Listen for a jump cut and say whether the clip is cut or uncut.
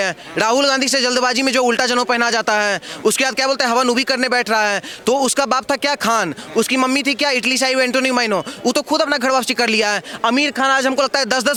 uncut